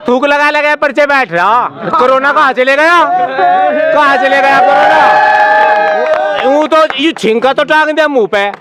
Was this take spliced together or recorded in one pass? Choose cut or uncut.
uncut